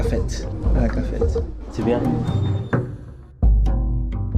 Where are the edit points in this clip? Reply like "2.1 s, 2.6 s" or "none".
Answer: 1.5 s